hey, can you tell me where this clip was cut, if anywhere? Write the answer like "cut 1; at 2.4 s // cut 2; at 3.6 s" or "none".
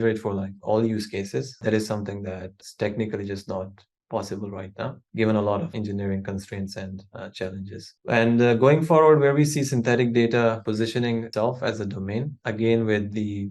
cut 1; at 1.5 s // cut 2; at 2.6 s // cut 3; at 5.0 s // cut 4; at 5.7 s // cut 5; at 10.7 s // cut 6; at 12.3 s